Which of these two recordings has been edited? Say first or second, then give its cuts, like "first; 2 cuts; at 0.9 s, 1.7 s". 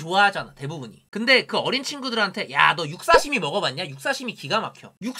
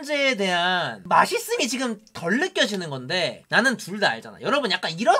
first; 1 cut; at 1.0 s